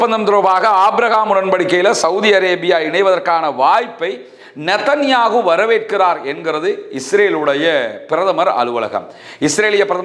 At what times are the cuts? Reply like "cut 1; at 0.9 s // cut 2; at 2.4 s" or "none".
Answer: none